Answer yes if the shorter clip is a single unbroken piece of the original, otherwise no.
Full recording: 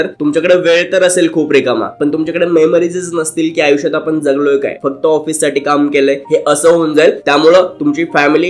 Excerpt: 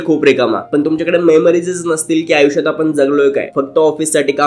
yes